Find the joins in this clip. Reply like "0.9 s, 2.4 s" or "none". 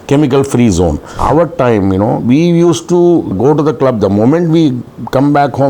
1.1 s, 3.3 s